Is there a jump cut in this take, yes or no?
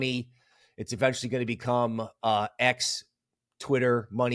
no